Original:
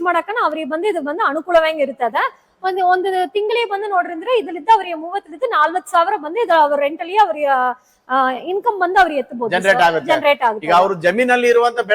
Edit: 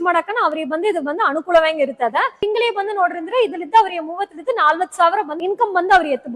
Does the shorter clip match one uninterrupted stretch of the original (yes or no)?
no